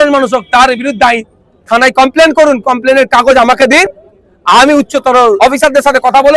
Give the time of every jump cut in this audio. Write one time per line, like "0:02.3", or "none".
0:05.4

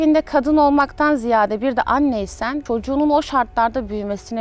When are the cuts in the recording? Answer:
0:02.6

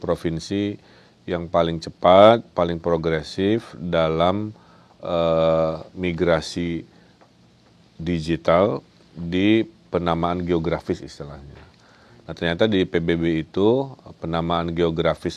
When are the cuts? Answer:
none

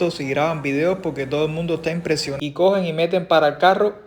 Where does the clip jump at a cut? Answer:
0:02.3

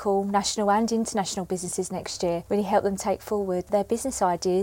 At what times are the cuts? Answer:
0:02.4
0:03.7

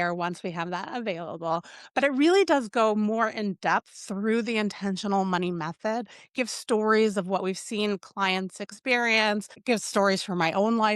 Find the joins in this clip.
0:09.5

